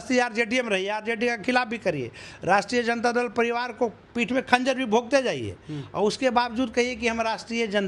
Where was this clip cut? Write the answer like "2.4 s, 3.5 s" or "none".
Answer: none